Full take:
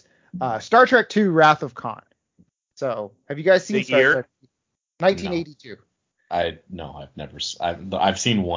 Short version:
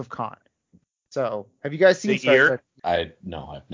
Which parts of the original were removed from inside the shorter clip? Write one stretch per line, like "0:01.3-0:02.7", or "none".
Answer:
0:04.4-0:06.2